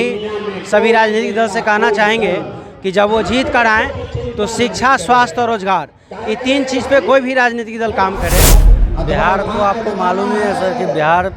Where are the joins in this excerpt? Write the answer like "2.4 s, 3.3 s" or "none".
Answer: 8.6 s

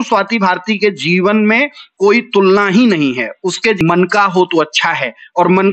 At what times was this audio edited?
3.8 s

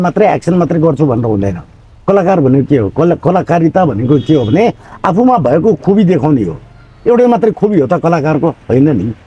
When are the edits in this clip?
none

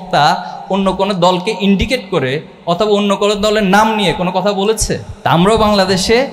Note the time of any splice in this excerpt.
5.1 s

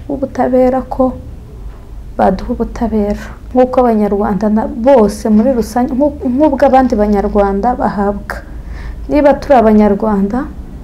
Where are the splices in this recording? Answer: 3.3 s

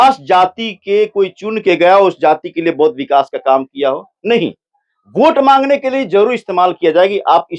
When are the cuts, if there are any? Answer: none

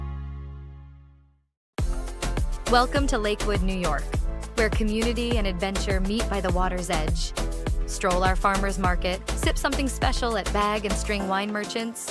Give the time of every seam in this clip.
1.8 s

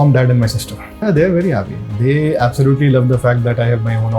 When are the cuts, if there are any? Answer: 1.0 s

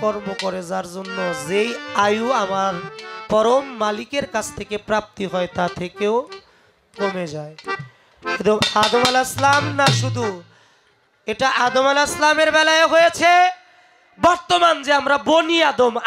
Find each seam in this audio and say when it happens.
none

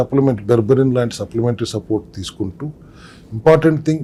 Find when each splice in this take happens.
none

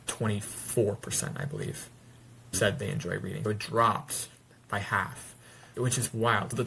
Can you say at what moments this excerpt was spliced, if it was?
none

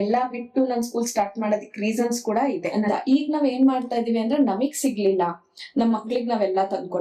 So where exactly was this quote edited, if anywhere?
2.7 s

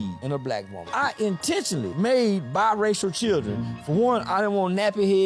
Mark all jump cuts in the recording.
0.9 s

